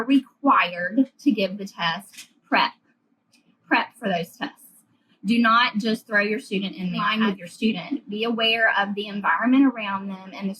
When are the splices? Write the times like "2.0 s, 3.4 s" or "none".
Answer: 7.1 s